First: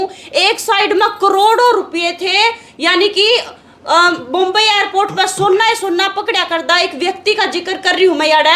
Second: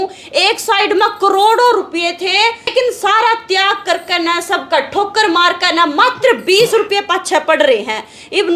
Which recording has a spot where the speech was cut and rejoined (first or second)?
second